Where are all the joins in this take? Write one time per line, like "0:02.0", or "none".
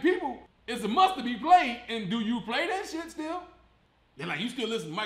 0:03.8